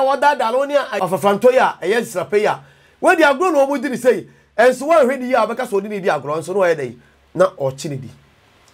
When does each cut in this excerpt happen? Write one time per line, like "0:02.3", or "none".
0:00.9